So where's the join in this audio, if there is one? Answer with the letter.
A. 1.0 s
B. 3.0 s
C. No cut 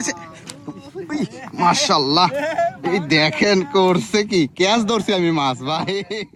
C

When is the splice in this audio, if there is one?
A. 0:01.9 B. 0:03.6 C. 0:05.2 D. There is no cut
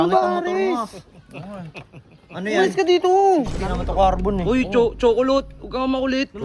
B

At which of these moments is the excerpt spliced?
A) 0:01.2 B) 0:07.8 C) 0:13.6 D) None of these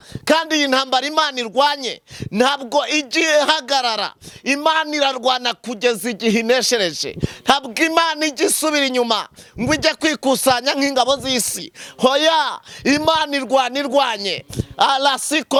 D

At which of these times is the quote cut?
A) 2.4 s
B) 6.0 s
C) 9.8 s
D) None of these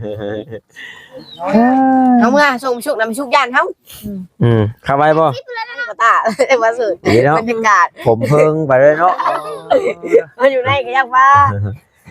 B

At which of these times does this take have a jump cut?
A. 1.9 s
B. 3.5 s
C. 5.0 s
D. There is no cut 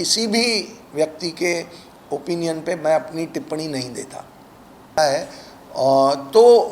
C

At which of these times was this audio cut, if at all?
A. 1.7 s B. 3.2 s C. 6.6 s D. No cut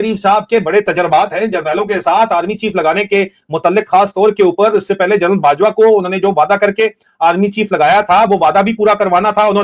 D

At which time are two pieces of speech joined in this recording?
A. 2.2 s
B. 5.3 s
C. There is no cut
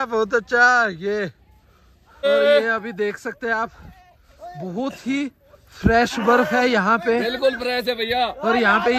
A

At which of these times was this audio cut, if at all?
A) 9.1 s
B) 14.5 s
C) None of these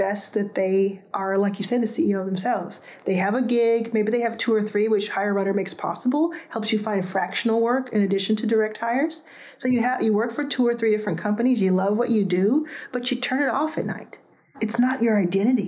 B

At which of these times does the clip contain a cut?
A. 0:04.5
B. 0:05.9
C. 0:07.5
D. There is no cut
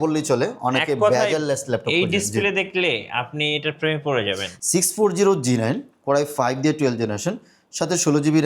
A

